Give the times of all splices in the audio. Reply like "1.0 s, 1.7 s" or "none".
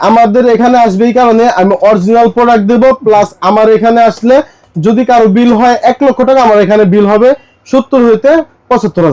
none